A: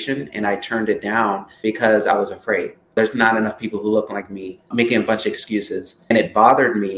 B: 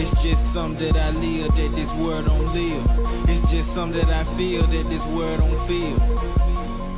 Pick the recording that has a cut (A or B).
A